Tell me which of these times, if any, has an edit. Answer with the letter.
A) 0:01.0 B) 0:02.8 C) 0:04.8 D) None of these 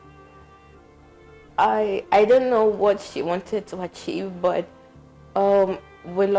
D